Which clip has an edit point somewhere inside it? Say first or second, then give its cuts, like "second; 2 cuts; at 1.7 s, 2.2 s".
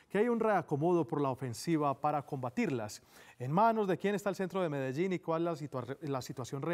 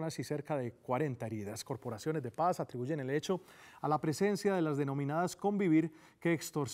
first; 1 cut; at 2.9 s